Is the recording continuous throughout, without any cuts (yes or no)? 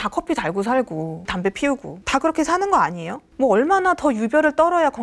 yes